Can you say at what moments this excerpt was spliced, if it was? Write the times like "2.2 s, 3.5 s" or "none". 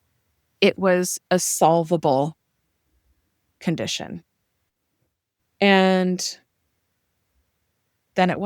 none